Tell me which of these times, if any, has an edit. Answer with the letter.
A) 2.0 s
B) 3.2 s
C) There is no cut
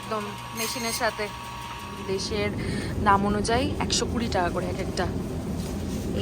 A